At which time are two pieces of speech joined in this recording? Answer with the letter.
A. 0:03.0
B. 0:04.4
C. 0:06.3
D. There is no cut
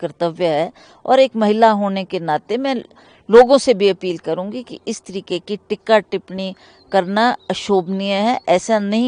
D